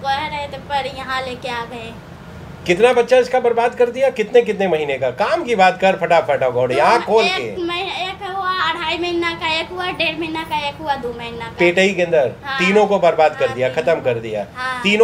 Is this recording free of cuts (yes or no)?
yes